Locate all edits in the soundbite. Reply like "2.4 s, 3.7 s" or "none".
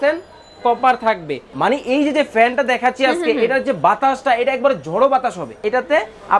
1.4 s, 5.5 s